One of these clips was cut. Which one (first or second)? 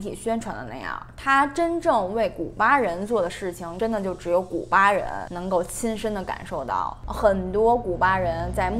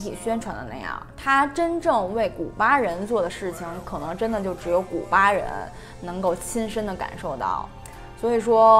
first